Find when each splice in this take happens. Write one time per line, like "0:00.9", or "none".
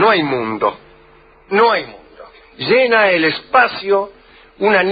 none